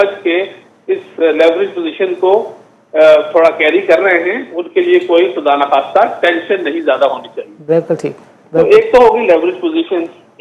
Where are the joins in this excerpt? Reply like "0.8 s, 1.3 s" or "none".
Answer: none